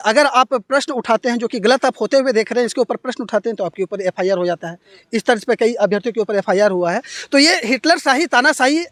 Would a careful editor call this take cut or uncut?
uncut